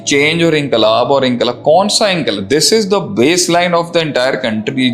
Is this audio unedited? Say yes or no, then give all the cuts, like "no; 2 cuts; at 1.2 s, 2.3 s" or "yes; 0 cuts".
yes; 0 cuts